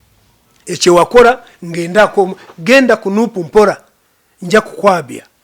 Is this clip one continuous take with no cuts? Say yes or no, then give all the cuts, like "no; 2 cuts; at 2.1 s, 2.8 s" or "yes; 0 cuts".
yes; 0 cuts